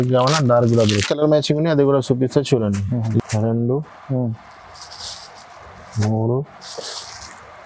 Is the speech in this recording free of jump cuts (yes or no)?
no